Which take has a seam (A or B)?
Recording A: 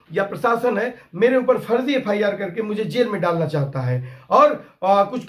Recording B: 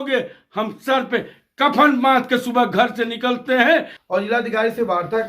B